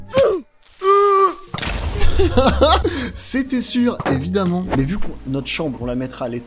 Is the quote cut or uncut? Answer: cut